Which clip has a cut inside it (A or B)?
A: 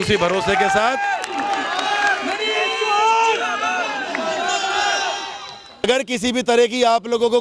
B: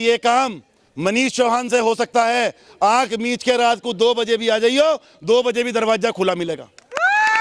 A